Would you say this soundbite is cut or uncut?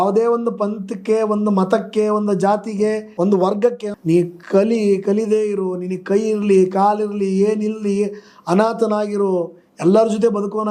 cut